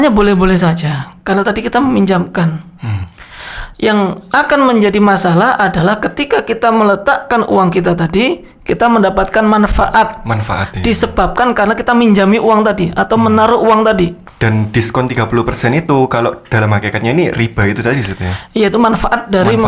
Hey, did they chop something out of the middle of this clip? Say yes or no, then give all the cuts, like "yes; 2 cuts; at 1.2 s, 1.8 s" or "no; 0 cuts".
yes; 1 cut; at 14.2 s